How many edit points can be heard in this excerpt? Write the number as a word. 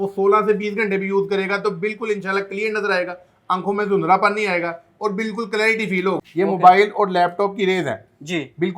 one